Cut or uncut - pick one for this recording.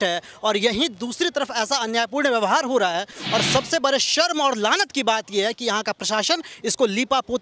uncut